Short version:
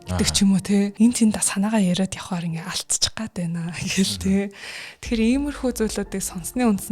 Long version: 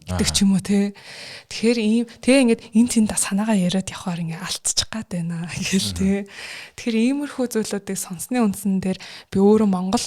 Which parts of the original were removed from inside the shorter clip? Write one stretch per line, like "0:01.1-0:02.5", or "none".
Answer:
0:00.9-0:02.7